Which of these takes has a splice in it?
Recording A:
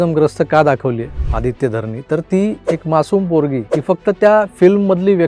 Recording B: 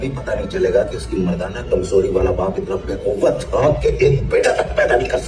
A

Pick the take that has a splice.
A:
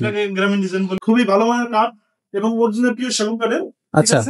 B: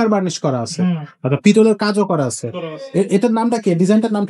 A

